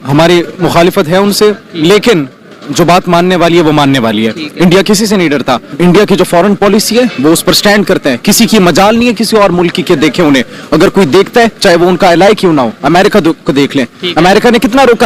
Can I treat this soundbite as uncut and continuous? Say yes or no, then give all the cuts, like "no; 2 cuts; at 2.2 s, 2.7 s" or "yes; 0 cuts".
no; 1 cut; at 5.7 s